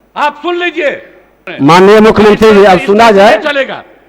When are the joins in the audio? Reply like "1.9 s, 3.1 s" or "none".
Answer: 1.4 s

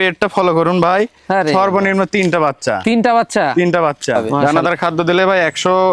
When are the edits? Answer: 4.3 s

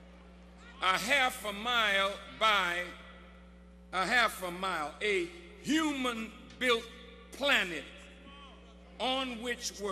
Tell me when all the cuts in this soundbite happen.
6.2 s

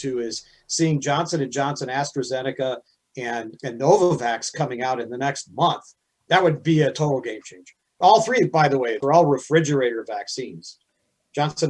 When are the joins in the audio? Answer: 7.9 s, 9.0 s

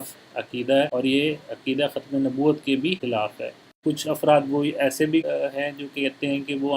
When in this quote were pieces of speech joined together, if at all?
3.7 s

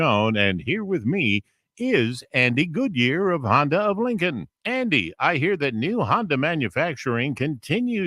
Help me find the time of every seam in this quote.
none

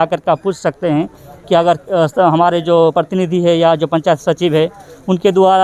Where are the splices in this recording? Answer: none

